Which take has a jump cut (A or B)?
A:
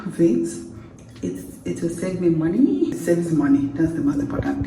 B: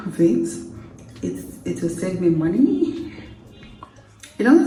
A